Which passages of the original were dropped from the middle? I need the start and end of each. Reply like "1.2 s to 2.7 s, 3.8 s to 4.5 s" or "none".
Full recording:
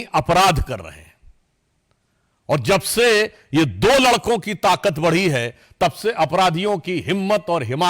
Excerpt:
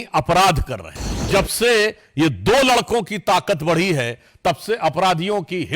1.3 s to 2.6 s

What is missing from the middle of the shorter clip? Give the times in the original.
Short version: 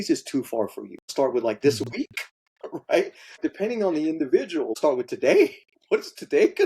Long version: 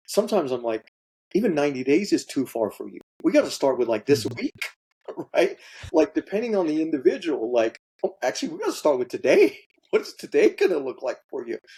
3.1 s to 3.5 s, 5.8 s to 6.1 s, 7.5 s to 8.8 s

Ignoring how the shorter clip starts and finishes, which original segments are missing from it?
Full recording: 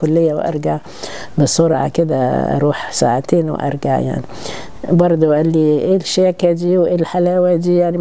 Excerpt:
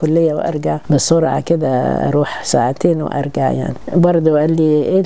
0.8 s to 1.3 s, 4.2 s to 4.7 s

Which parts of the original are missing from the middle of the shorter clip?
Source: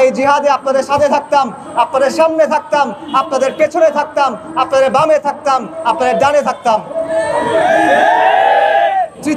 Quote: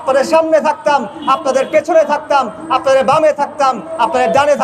none

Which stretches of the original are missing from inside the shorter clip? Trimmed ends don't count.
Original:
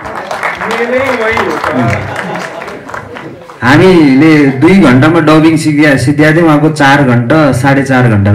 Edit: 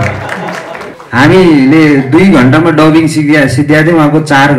2.8 s to 3.4 s

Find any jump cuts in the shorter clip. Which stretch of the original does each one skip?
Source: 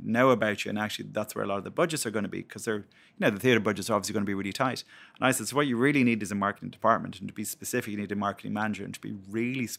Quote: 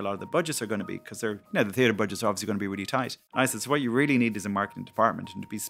2.9 s to 3.1 s, 4.9 s to 5.1 s

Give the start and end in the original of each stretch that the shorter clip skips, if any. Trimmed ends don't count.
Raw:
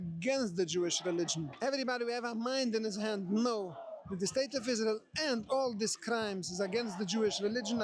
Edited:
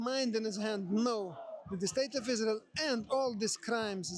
none

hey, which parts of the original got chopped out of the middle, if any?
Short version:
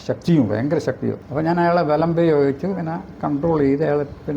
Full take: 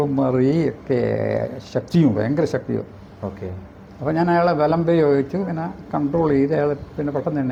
2.9 s to 3.9 s

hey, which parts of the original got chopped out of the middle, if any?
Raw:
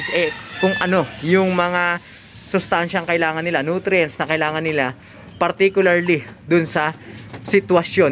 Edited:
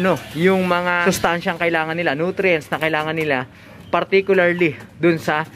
1.9 s to 2.5 s

